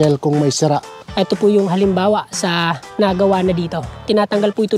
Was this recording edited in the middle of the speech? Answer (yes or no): yes